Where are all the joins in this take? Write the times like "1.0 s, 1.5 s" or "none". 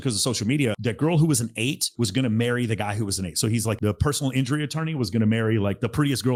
none